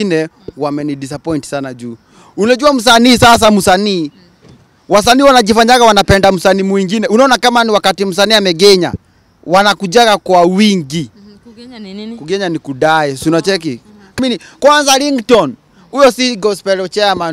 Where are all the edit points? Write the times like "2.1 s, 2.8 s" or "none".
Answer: 14.2 s